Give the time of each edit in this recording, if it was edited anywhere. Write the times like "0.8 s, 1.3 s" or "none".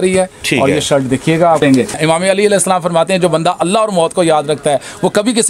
1.7 s